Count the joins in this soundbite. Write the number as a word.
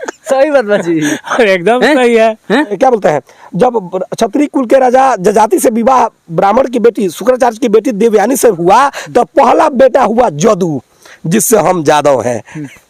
one